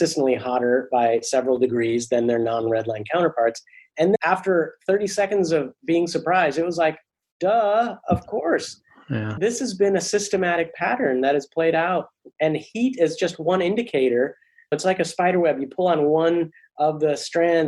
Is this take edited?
yes; 3 cuts; at 4.2 s, 9.4 s, 14.8 s

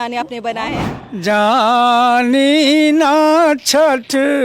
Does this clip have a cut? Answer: yes; 1 cut; at 0.9 s

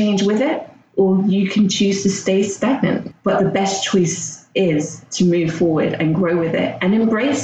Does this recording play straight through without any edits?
no; 1 cut; at 3.1 s

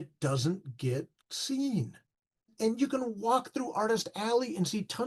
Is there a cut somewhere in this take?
yes; 1 cut; at 2.3 s

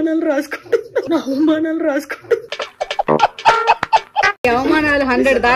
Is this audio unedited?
no; 3 cuts; at 1.1 s, 2.4 s, 4.4 s

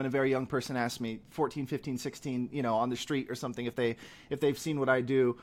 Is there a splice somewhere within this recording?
no; 0 cuts

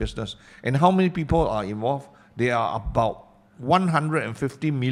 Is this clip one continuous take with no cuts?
yes; 0 cuts

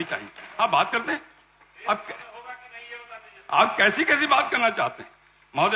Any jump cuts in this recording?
no; 0 cuts

